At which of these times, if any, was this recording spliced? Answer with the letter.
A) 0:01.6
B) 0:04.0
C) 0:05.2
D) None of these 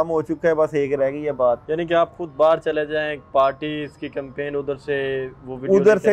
A